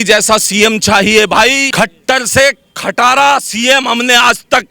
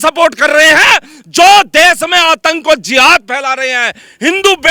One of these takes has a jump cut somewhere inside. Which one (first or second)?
first